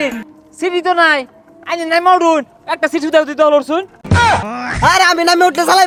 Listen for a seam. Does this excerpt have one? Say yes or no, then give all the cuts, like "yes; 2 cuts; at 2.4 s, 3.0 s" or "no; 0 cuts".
no; 0 cuts